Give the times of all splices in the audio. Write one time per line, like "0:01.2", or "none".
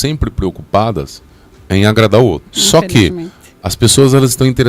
0:02.5